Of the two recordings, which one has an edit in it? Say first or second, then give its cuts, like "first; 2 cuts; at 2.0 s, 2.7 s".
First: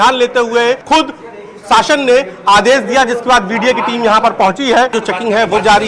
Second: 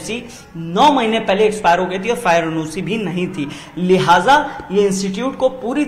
first; 2 cuts; at 0.8 s, 5.0 s